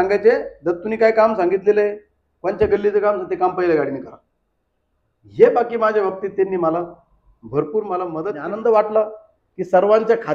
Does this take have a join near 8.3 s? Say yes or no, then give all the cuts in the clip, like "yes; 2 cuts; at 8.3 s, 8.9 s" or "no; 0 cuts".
yes; 1 cut; at 8.3 s